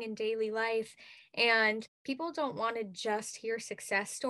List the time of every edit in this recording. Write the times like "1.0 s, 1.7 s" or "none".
2.0 s

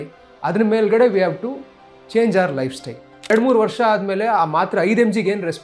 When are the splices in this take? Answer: 3.3 s

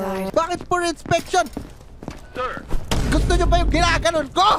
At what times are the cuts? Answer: none

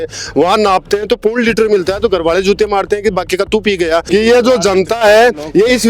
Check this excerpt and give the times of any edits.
4.0 s

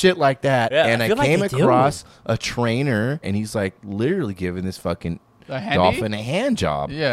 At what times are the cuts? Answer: 3.2 s

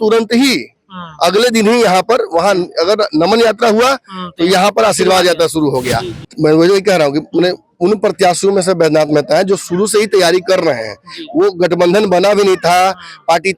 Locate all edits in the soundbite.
6.1 s

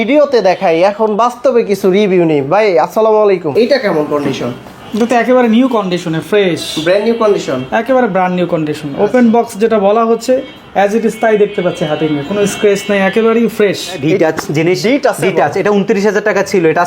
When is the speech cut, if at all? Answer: 3.5 s, 14.0 s

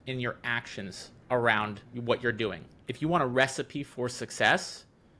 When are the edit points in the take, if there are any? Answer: 1.9 s, 2.8 s

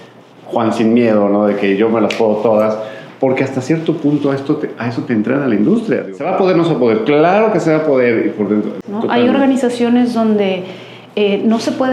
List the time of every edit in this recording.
6.0 s, 8.8 s

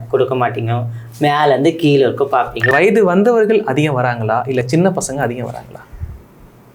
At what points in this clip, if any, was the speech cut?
2.6 s

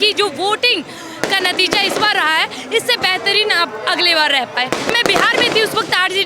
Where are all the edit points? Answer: 4.9 s

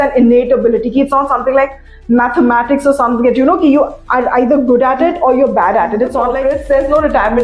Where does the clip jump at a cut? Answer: 6.4 s

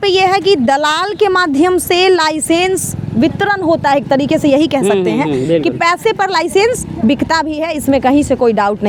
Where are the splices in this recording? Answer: none

